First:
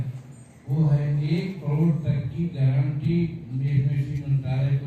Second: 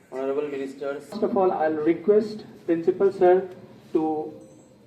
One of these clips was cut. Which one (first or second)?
second